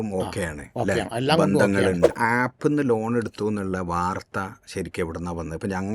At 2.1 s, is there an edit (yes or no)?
yes